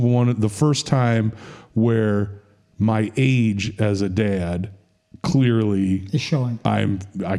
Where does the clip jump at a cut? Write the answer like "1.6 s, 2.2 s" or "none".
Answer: none